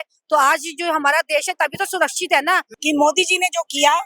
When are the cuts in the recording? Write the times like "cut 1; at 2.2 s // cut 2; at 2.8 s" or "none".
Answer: cut 1; at 2.7 s

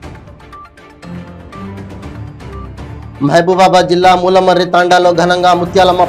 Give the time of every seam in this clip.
none

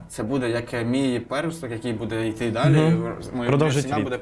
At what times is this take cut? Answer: none

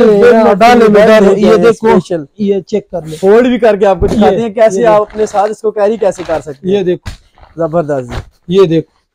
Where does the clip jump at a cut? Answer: none

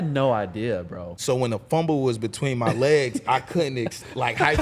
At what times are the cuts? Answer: cut 1; at 1.1 s

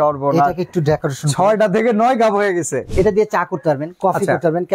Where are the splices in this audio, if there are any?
cut 1; at 2.9 s

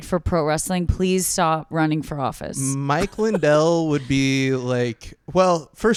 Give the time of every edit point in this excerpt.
none

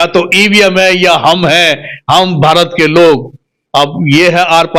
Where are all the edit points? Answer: none

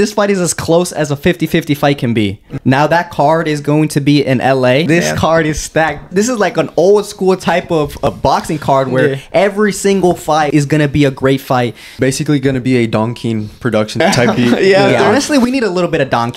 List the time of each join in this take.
cut 1; at 2.5 s // cut 2; at 4.9 s // cut 3; at 6.1 s // cut 4; at 8.1 s // cut 5; at 10.5 s // cut 6; at 11.9 s // cut 7; at 14.0 s

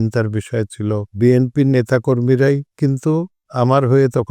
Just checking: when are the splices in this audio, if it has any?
cut 1; at 1.1 s // cut 2; at 3.4 s

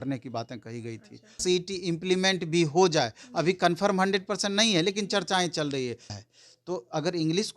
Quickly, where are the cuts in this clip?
cut 1; at 1.4 s // cut 2; at 6.1 s

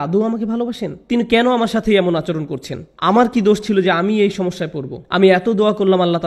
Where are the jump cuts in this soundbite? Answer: none

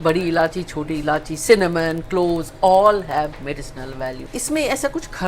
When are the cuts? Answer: cut 1; at 4.2 s

